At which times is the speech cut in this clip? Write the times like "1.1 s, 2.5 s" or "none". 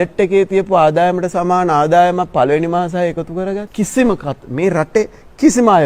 3.7 s